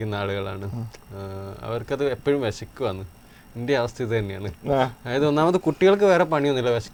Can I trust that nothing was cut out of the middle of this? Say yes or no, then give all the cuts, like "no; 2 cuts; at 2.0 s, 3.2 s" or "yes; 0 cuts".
yes; 0 cuts